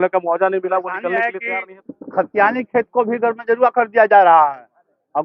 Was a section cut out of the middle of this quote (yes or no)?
yes